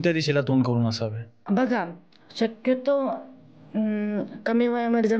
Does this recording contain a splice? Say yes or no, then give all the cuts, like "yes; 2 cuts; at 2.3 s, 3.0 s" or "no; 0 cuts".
yes; 1 cut; at 1.4 s